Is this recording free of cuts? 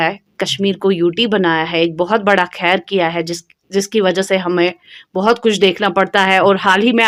yes; 0 cuts

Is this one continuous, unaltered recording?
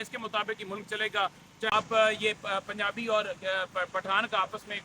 no; 1 cut; at 1.7 s

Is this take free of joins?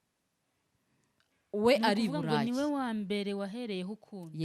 yes; 0 cuts

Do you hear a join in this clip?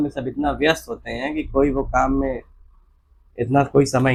no; 0 cuts

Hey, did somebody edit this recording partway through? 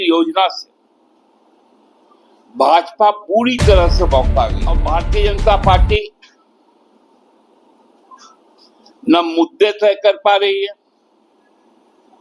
yes; 1 cut; at 4.8 s

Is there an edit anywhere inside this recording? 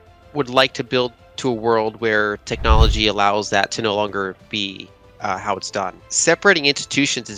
yes; 1 cut; at 6.1 s

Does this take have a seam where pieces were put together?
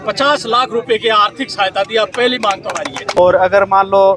yes; 1 cut; at 3.2 s

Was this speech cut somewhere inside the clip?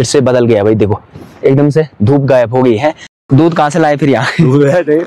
yes; 1 cut; at 3.3 s

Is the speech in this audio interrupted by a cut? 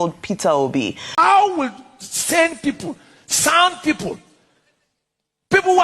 yes; 1 cut; at 1.0 s

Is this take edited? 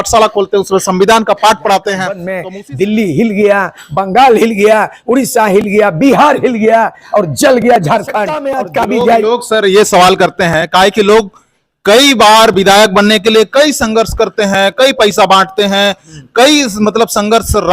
yes; 2 cuts; at 2.3 s, 8.5 s

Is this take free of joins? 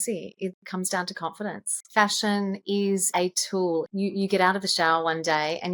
no; 2 cuts; at 2.9 s, 3.9 s

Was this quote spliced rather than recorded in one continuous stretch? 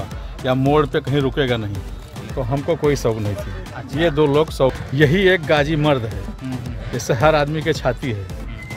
yes; 2 cuts; at 1.9 s, 4.8 s

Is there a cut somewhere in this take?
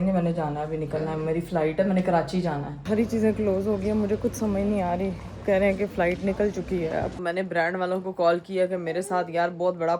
yes; 2 cuts; at 2.8 s, 7.2 s

